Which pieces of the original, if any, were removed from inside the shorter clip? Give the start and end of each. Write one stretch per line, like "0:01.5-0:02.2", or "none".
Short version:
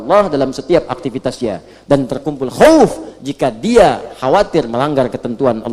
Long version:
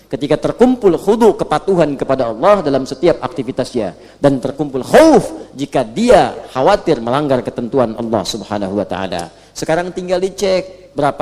none